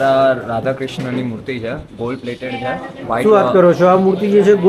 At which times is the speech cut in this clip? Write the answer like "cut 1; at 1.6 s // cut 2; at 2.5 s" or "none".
none